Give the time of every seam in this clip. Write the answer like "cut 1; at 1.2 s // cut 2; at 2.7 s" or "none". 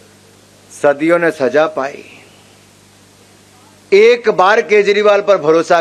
none